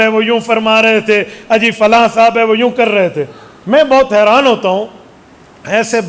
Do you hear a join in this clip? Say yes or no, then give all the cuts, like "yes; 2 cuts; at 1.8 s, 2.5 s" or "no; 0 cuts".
no; 0 cuts